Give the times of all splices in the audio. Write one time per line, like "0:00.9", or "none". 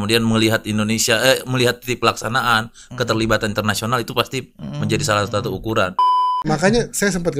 0:06.4